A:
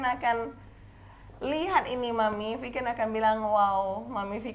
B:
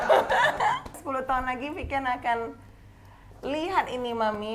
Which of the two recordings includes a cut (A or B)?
B